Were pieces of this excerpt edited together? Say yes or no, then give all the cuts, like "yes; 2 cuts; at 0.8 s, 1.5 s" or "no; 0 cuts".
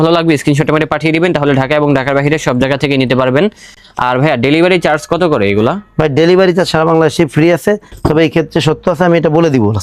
no; 0 cuts